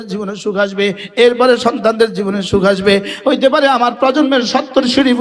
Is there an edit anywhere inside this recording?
yes; 1 cut; at 3.1 s

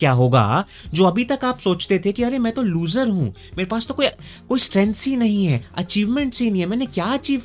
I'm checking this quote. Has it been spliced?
no; 0 cuts

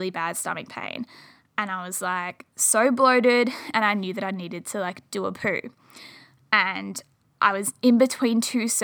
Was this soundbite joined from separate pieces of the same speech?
no; 0 cuts

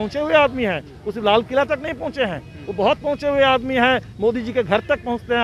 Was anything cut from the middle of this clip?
no; 0 cuts

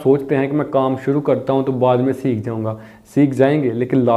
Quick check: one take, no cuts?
yes; 0 cuts

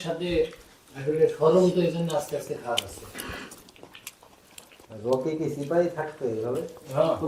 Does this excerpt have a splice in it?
no; 0 cuts

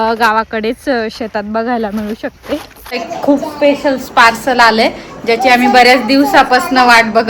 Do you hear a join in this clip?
yes; 1 cut; at 3.1 s

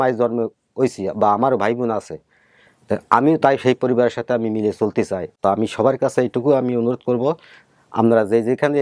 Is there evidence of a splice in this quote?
no; 0 cuts

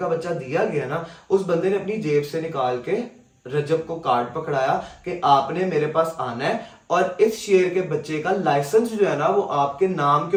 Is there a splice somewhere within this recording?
no; 0 cuts

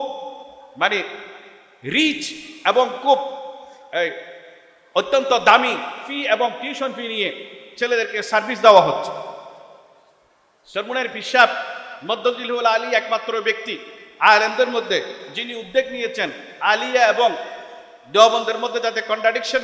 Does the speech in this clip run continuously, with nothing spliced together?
yes; 0 cuts

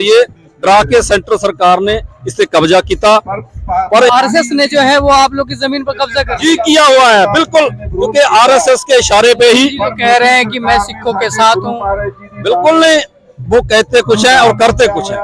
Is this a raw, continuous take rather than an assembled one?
no; 1 cut; at 4.1 s

